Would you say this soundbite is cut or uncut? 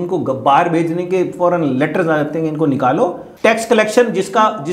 cut